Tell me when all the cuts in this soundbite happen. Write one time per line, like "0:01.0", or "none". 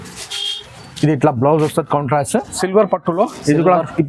0:02.5